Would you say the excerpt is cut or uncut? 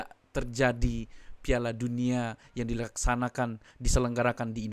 uncut